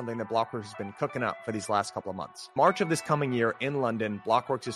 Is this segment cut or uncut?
uncut